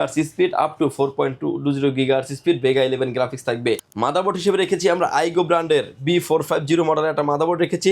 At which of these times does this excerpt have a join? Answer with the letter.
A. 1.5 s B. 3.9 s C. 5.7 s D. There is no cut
B